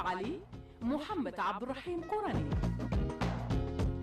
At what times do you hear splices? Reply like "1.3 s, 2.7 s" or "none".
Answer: 2.6 s